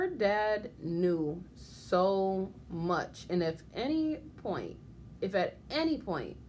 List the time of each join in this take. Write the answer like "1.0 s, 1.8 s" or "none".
none